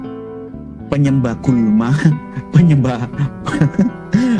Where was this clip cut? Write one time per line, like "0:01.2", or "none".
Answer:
none